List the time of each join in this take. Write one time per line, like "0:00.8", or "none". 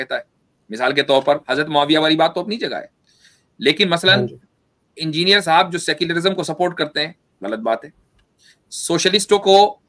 none